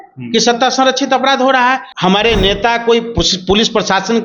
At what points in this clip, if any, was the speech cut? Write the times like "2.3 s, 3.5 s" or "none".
2.0 s